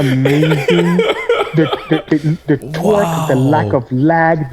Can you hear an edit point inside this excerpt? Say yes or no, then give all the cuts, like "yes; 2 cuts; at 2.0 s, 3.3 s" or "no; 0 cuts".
no; 0 cuts